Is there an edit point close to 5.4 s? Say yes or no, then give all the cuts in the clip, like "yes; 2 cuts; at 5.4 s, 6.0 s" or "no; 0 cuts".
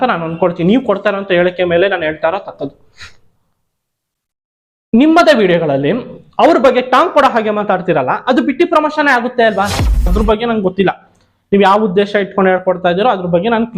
no; 1 cut; at 10.1 s